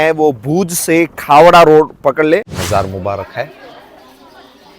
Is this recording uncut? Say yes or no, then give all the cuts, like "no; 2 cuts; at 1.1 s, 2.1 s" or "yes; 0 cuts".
no; 1 cut; at 2.4 s